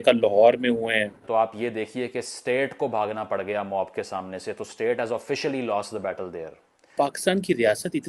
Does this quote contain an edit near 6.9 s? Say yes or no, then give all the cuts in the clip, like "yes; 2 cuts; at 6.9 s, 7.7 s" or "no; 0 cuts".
yes; 2 cuts; at 1.2 s, 6.9 s